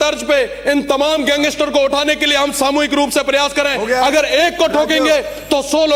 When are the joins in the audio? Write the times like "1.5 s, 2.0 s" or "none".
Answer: none

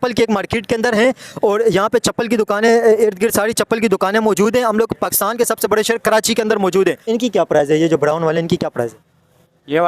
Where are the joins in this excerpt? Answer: 7.0 s

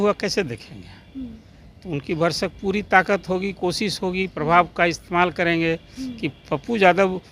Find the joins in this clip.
none

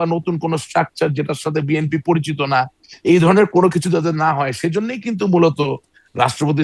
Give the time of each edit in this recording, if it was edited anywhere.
none

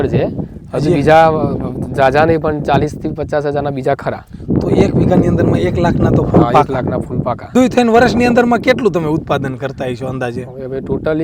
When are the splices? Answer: 7.5 s

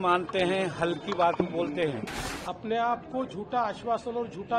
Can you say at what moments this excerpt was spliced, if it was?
2.1 s

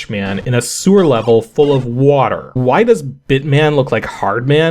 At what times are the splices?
2.6 s

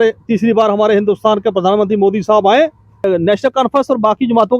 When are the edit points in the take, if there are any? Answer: 3.1 s

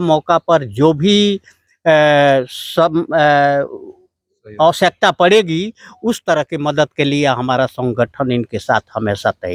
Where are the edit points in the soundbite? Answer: none

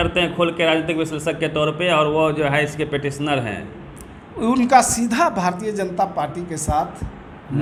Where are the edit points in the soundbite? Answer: none

